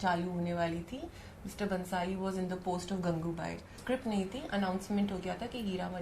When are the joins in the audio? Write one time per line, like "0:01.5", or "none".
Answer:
0:03.8